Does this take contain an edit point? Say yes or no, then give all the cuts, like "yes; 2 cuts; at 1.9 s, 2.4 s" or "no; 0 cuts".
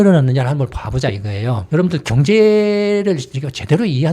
yes; 1 cut; at 1.6 s